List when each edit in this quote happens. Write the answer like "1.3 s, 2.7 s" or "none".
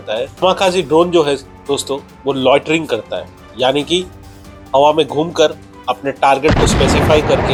none